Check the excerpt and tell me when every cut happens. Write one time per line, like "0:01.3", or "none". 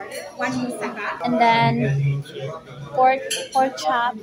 0:01.2